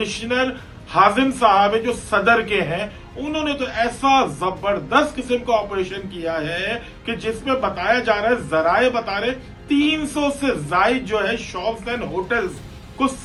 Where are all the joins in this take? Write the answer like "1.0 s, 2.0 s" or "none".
none